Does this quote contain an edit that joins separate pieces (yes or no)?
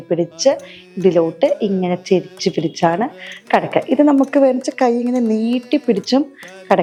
no